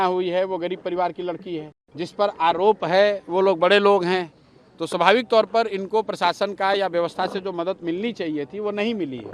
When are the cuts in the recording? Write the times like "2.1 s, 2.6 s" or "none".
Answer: 1.8 s

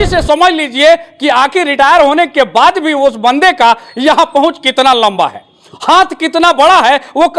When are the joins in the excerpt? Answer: none

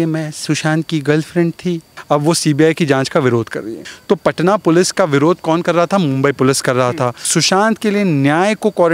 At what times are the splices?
1.9 s, 3.9 s, 7.3 s

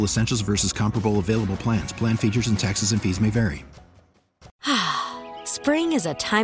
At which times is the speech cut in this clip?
4.5 s

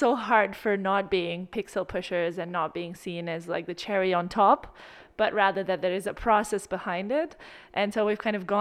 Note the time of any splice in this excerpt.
1.4 s

